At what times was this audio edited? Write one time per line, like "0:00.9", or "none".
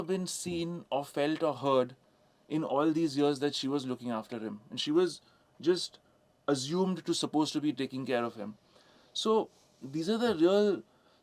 none